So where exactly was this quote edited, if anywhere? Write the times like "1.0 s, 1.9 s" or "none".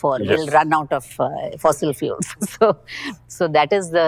none

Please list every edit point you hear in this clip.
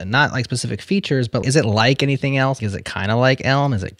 1.4 s, 2.6 s

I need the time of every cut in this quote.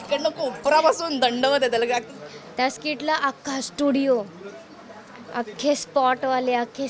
2.1 s

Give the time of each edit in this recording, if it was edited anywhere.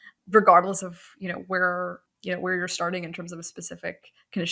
2.0 s

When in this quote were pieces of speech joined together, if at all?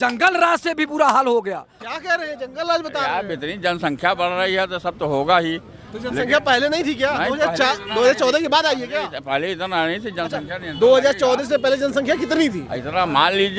none

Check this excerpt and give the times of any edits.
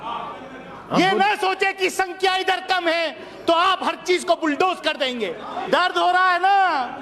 5.5 s

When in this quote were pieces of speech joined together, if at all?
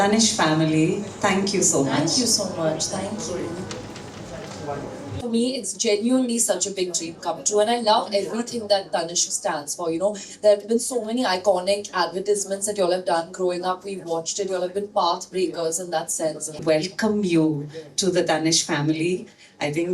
5.1 s, 16.6 s

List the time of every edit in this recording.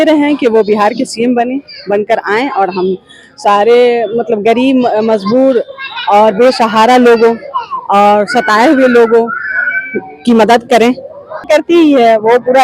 11.4 s

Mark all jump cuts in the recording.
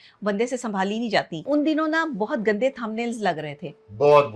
1.4 s

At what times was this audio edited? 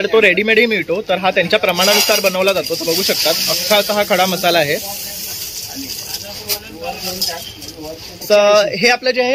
8.2 s

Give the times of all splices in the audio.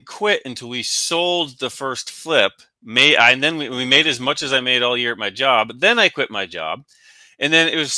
none

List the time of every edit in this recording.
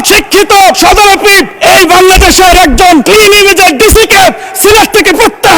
none

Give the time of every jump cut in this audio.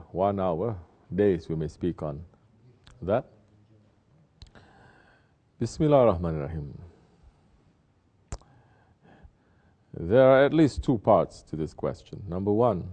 3.7 s

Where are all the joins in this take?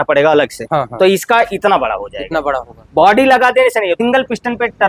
4.0 s

